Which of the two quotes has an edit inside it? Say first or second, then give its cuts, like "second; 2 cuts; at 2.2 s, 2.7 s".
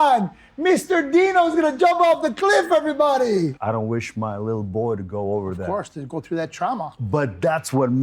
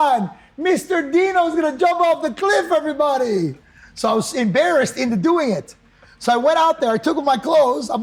first; 2 cuts; at 3.6 s, 7.0 s